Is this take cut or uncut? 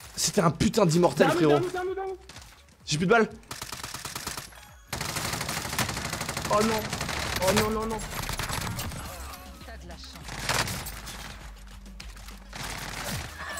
uncut